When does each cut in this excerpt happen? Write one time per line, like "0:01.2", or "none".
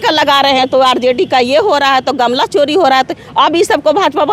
none